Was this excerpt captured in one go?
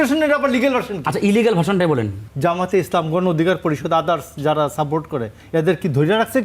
no; 1 cut; at 2.2 s

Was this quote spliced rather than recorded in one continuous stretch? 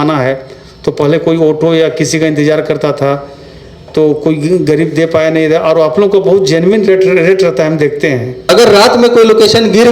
yes; 1 cut; at 8.3 s

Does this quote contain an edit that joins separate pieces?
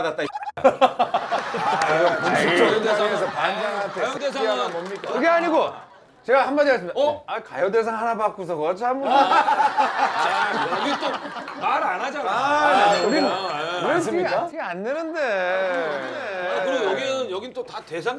no; 0 cuts

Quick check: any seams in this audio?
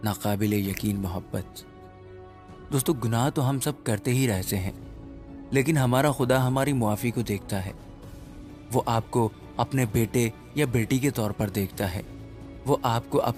no; 0 cuts

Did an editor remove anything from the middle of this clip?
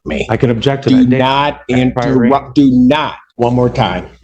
yes; 1 cut; at 3.2 s

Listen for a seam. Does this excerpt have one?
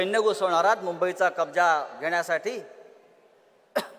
no; 0 cuts

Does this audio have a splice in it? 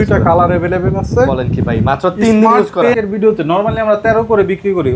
yes; 1 cut; at 3.0 s

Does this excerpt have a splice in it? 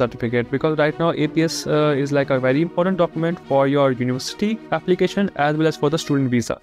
no; 0 cuts

